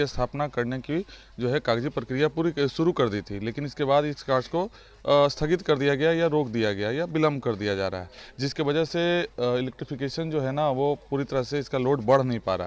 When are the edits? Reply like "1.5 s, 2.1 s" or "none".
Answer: none